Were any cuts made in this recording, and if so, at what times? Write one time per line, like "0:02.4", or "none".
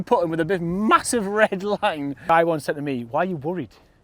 0:02.2